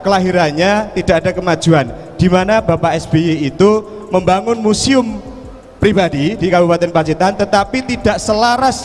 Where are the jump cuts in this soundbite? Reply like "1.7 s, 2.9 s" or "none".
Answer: none